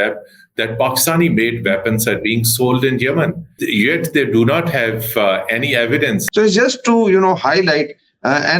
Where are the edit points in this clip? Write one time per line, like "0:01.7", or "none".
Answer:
0:03.5
0:06.2